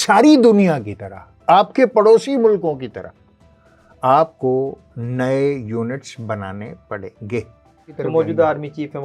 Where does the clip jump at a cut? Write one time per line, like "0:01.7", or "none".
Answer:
0:07.9

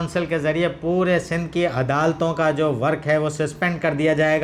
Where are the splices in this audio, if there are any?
none

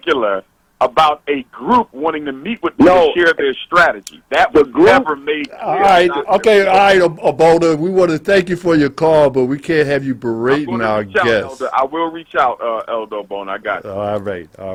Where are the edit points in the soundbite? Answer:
none

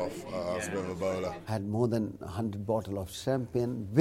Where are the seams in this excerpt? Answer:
0:01.4

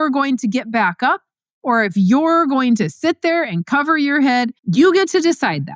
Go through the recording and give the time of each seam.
0:04.6

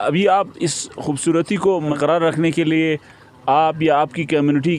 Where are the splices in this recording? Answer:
0:02.0

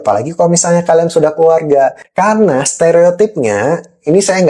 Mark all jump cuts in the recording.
0:02.0

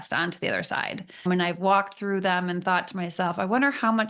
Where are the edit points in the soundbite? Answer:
0:01.2

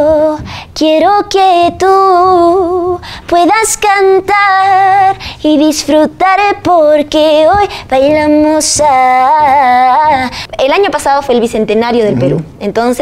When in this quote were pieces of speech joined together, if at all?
0:10.4

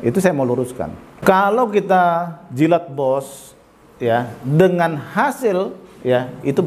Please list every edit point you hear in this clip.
0:01.2

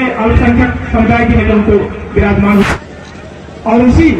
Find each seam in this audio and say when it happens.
0:02.6

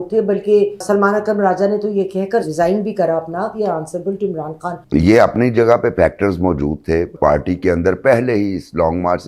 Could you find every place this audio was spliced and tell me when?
0:03.5
0:04.8
0:07.1

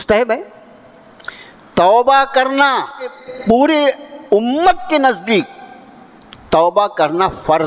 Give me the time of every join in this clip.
0:03.3

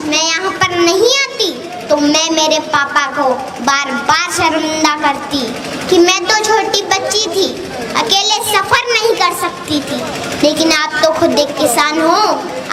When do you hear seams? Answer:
none

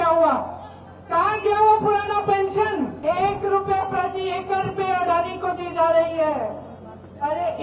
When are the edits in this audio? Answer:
0:03.0

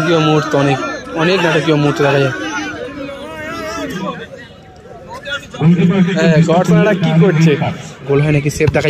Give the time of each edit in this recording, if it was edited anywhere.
0:04.0
0:08.0

